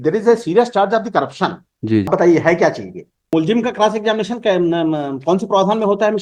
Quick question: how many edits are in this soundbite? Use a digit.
2